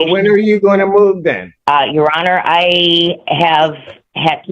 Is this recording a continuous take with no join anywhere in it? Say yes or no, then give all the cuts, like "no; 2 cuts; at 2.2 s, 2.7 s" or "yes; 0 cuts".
no; 1 cut; at 1.5 s